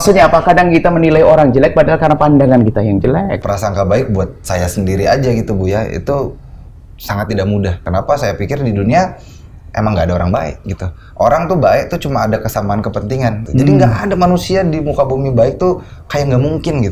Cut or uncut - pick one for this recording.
cut